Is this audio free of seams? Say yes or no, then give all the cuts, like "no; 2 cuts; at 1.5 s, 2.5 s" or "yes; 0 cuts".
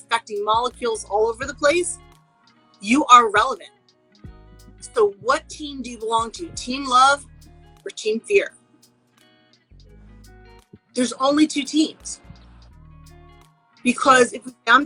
yes; 0 cuts